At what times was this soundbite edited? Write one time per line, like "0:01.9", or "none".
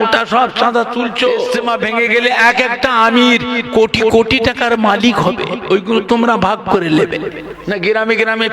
0:01.6
0:07.5